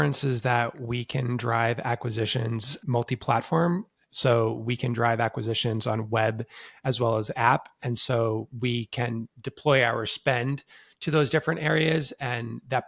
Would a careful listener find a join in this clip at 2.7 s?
yes; 1 cut; at 2.7 s

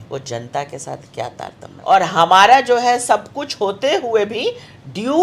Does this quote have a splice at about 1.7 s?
yes; 1 cut; at 1.7 s

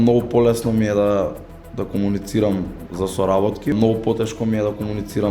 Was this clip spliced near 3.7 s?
yes; 1 cut; at 3.7 s

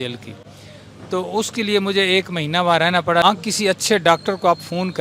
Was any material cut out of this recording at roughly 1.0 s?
no; 1 cut; at 3.2 s

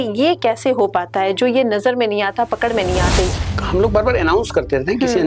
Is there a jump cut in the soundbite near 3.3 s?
yes; 1 cut; at 3.3 s

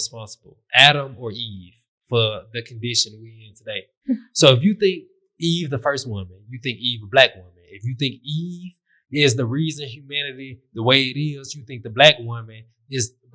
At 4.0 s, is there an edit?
yes; 1 cut; at 4.0 s

